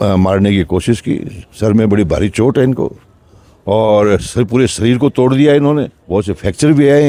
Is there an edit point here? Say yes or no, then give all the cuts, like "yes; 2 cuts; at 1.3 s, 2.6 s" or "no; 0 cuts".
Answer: no; 0 cuts